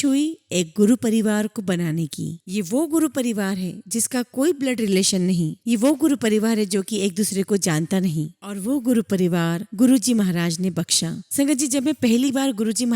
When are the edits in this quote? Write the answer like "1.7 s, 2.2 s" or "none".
11.2 s